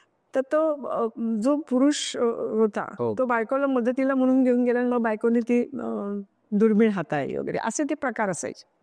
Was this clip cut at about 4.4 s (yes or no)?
no